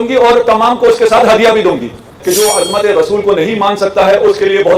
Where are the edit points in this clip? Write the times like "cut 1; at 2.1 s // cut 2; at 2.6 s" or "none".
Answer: cut 1; at 2.1 s